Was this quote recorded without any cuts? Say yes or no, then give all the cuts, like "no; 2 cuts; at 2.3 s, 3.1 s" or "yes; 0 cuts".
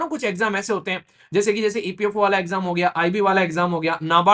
yes; 0 cuts